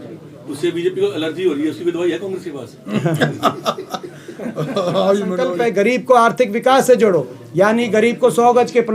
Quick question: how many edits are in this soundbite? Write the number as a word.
one